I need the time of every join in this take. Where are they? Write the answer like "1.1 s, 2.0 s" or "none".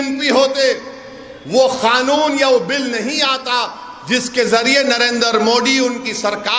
none